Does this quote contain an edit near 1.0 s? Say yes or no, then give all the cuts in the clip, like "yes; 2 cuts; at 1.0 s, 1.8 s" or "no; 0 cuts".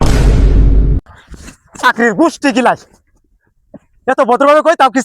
yes; 1 cut; at 1.0 s